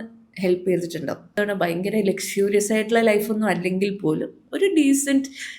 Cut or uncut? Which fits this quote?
cut